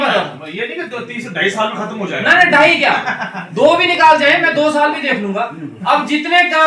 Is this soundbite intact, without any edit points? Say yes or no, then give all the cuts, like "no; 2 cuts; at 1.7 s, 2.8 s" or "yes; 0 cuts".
yes; 0 cuts